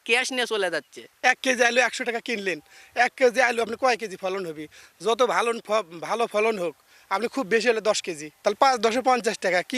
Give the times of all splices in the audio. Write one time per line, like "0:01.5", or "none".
0:01.0